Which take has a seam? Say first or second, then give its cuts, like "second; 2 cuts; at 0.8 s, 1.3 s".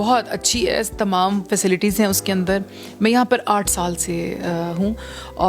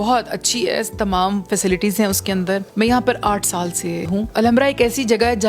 second; 2 cuts; at 2.7 s, 4.2 s